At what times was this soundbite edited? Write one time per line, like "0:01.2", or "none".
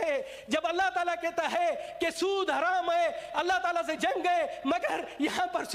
none